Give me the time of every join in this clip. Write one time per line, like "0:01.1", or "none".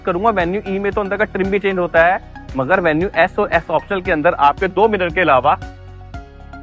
none

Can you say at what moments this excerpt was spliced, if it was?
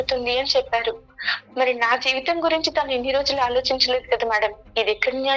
none

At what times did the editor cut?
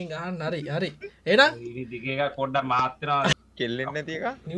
0:03.3

